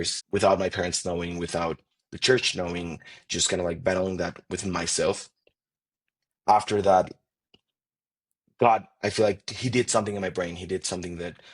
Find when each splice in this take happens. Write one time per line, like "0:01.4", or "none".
none